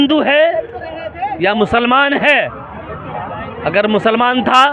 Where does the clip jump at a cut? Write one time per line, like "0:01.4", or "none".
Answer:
none